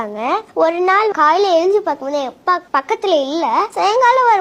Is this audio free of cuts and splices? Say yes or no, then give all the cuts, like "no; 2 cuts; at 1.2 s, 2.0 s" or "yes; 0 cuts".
no; 2 cuts; at 1.1 s, 2.7 s